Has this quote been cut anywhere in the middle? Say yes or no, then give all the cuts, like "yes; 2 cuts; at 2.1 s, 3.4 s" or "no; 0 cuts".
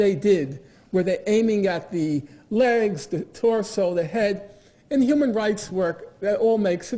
no; 0 cuts